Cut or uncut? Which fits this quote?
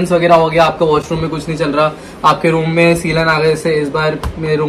uncut